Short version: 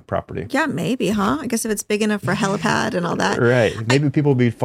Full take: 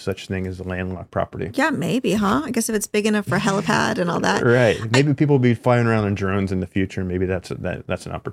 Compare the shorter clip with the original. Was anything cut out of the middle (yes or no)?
no